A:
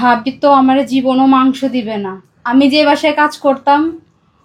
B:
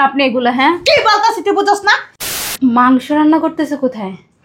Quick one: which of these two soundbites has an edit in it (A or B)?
B